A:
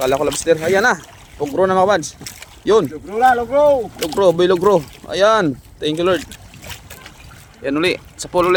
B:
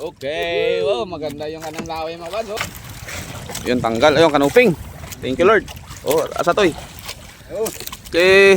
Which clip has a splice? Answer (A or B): B